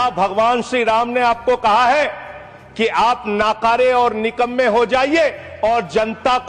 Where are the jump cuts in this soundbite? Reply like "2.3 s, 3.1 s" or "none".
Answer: none